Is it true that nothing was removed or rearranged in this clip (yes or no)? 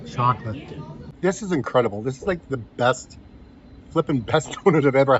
no